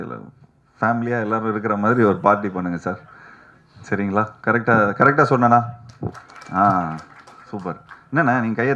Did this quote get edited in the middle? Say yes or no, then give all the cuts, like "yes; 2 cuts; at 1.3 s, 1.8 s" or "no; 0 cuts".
no; 0 cuts